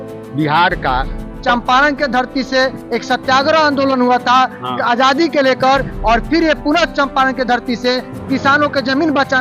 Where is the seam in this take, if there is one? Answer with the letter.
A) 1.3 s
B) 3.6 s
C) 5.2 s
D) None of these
A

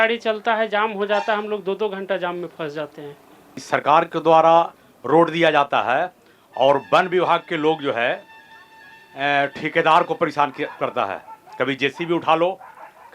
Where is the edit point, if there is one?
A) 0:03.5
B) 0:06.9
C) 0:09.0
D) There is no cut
A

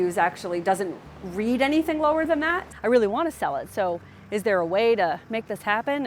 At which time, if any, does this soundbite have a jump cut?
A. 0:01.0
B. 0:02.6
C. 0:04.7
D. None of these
B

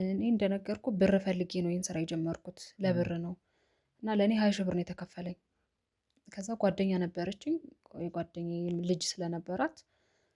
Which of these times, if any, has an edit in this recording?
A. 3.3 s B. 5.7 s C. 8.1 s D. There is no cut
D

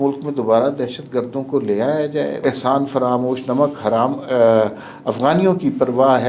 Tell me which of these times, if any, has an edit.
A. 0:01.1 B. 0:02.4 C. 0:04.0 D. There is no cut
B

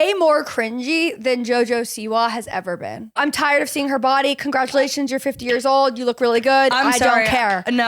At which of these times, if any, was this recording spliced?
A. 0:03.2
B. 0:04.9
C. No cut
A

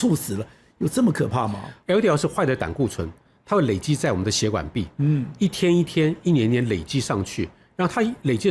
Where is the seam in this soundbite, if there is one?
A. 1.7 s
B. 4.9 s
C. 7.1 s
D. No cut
A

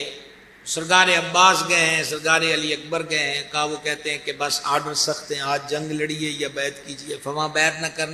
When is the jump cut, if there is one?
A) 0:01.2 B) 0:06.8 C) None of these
C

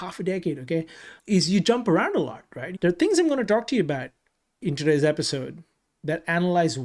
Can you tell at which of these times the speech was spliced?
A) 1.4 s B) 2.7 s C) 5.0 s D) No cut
B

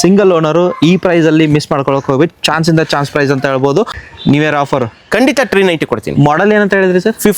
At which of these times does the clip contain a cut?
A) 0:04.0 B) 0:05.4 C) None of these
A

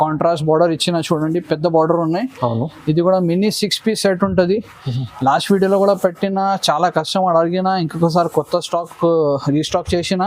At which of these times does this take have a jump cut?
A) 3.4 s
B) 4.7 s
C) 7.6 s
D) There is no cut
D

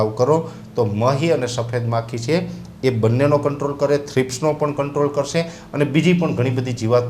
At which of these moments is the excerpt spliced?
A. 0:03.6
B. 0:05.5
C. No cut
C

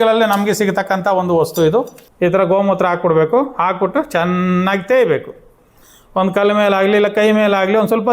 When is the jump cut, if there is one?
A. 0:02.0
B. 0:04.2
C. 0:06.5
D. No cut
A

